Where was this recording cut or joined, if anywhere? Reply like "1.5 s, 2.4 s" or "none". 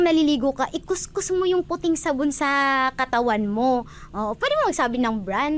none